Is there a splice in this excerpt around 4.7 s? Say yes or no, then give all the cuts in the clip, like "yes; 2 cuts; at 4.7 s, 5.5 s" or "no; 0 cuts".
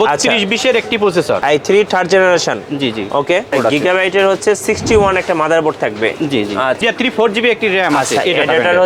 no; 3 cuts; at 1.4 s, 3.5 s, 6.8 s